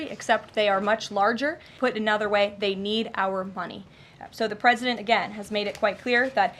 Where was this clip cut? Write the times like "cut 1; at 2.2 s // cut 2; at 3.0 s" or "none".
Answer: cut 1; at 1.7 s